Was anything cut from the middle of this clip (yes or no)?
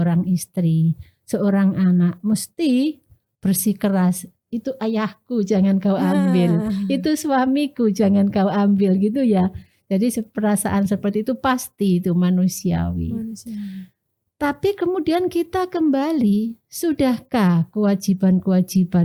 no